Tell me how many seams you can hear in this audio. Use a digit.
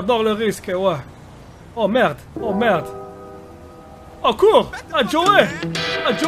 0